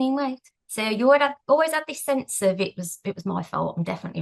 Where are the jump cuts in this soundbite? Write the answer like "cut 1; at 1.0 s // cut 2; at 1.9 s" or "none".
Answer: none